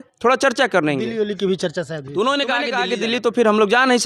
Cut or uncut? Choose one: cut